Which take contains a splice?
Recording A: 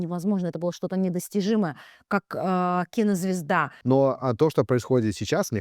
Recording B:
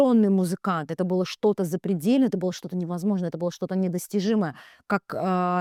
A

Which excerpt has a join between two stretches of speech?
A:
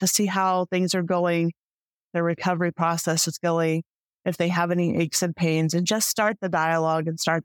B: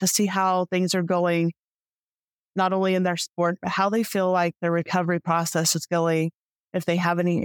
A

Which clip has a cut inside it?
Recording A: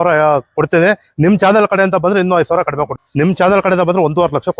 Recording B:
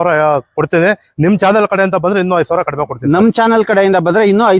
A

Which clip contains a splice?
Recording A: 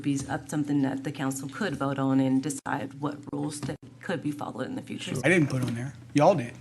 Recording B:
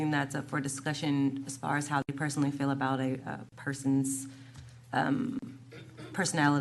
A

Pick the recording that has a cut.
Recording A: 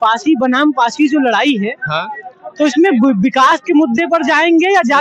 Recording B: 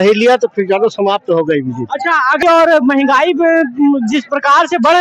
B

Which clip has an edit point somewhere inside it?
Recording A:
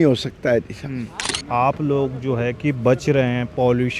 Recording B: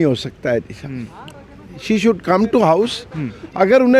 A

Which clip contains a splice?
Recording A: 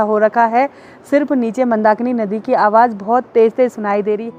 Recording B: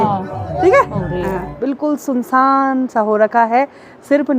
B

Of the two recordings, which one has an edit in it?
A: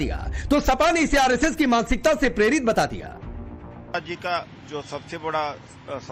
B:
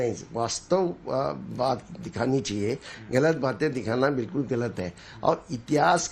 B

